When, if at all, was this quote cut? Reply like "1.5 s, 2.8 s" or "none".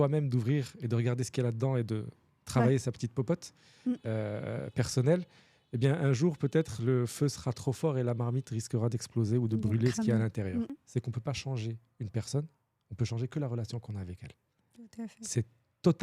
10.8 s